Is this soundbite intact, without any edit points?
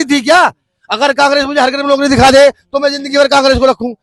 yes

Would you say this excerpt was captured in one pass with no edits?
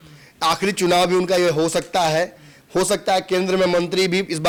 yes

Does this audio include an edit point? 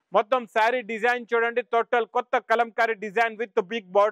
no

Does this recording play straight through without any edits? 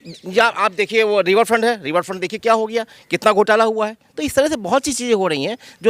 yes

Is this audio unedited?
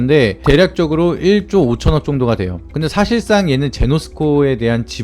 no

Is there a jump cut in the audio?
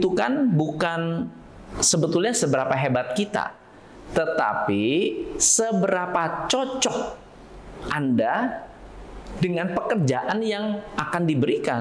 no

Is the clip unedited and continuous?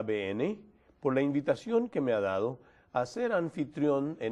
yes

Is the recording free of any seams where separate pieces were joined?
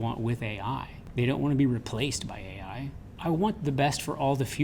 no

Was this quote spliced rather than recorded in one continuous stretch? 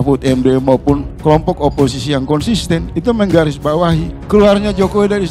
yes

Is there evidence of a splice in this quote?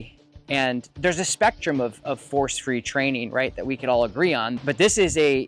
yes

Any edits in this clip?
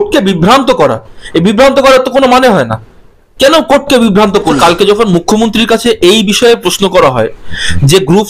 yes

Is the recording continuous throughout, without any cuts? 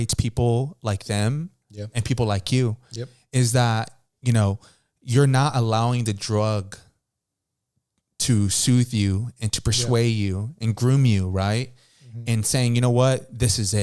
yes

